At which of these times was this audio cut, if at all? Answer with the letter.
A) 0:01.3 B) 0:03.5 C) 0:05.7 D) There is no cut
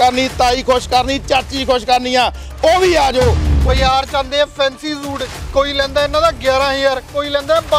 B